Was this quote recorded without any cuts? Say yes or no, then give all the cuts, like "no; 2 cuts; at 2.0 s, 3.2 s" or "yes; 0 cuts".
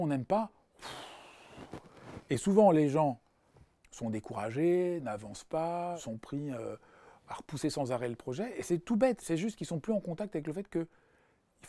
no; 2 cuts; at 6.0 s, 9.2 s